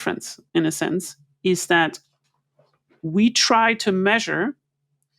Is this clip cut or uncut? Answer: uncut